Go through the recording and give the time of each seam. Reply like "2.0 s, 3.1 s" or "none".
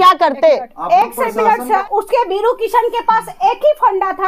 1.8 s